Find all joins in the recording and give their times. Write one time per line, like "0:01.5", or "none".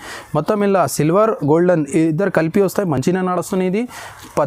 none